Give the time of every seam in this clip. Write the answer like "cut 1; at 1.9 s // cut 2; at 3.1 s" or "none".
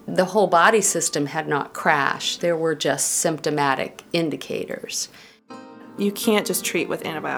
cut 1; at 5.8 s